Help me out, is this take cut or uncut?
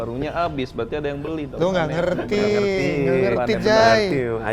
uncut